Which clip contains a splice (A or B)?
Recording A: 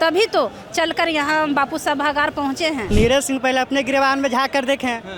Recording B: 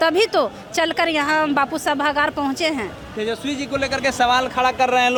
A